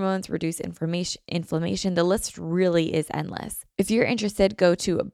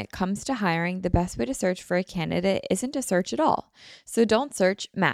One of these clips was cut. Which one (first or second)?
first